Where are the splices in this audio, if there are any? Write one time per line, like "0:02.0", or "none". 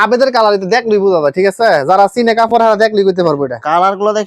none